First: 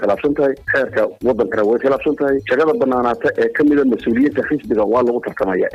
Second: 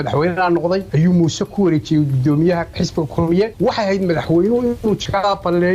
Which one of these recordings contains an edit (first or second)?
second